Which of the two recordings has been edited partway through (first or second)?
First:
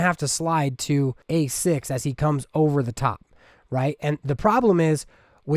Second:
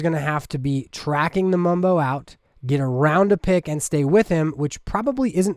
first